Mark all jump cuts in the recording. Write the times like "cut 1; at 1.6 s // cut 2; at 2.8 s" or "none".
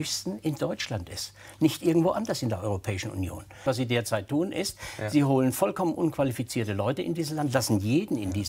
cut 1; at 3.7 s

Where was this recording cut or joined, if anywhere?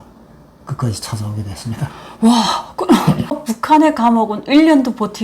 cut 1; at 3.3 s

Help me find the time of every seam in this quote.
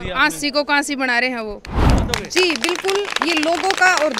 cut 1; at 1.7 s

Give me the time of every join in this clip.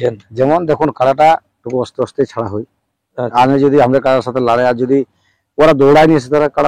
none

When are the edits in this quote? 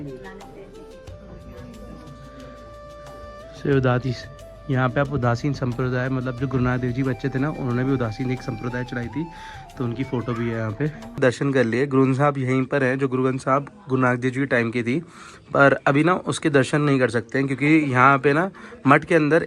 cut 1; at 11.2 s

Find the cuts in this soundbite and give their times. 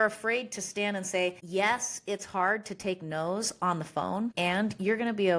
cut 1; at 1.4 s // cut 2; at 4.3 s

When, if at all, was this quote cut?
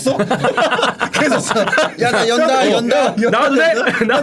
cut 1; at 1.9 s

